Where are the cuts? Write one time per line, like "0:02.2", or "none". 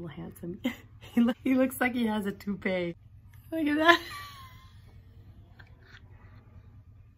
0:01.4
0:03.1